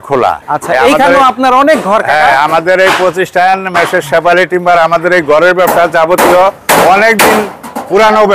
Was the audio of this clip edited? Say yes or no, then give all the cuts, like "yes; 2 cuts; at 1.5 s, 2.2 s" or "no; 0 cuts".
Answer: no; 0 cuts